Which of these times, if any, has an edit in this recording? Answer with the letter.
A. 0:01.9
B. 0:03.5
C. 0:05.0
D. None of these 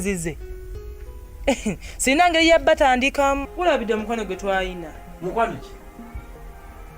B